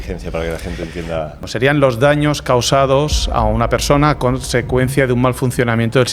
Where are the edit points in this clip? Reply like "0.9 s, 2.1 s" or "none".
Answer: 1.4 s